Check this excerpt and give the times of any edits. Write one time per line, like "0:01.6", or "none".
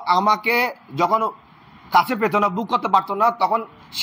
none

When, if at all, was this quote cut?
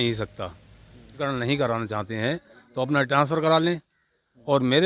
0:01.2

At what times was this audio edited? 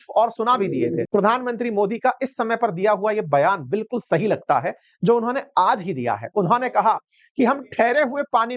0:01.1

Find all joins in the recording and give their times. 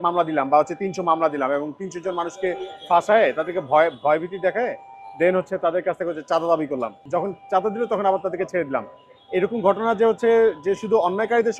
0:07.0

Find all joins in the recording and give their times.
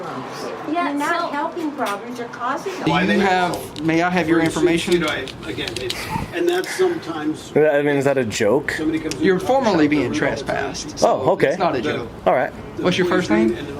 0:02.9

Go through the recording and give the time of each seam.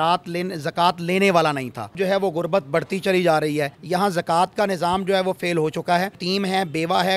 0:01.9
0:03.8
0:06.2

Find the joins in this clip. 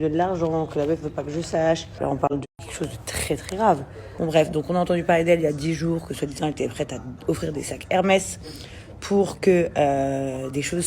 0:02.0
0:04.0

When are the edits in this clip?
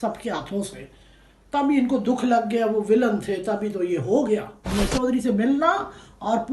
0:04.7

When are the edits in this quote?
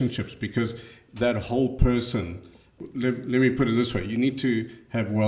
0:02.8

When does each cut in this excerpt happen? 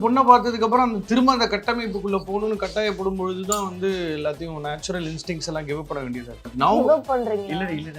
0:06.5

